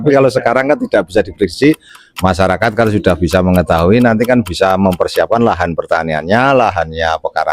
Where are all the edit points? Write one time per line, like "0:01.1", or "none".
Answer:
0:01.9